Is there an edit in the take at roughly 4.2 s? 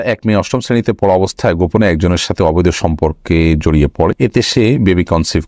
yes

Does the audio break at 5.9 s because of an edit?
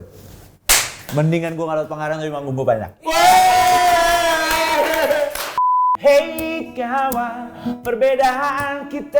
yes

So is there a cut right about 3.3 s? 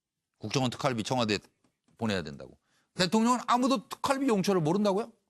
yes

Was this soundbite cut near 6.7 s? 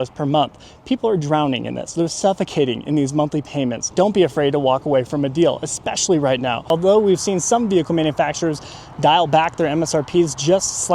yes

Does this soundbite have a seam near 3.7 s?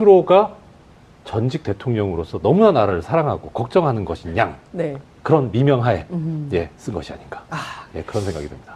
yes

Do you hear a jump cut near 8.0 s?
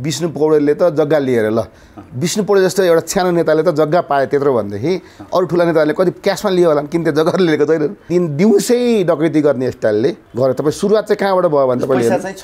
yes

